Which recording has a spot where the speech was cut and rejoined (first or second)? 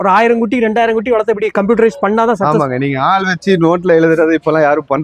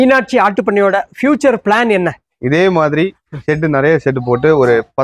second